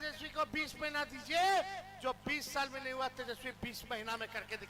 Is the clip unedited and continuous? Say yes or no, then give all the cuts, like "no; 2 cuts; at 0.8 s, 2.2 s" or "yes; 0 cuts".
yes; 0 cuts